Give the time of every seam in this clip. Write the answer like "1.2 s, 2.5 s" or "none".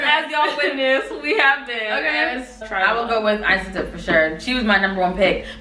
2.7 s